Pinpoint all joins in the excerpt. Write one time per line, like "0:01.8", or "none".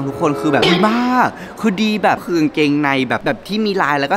0:02.2